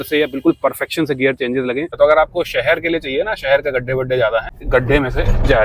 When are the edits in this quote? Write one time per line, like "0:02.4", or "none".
0:01.9
0:04.6